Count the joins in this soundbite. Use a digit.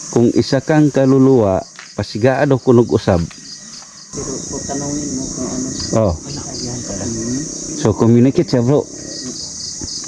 1